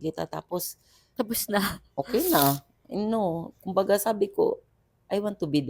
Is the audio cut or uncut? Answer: uncut